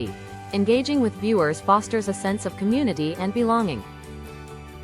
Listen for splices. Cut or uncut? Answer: cut